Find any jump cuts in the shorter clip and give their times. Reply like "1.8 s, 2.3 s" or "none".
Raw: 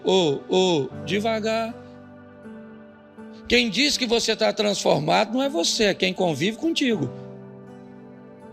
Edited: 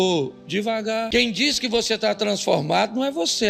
1.1 s